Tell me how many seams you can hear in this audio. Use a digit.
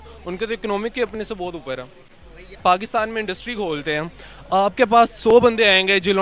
1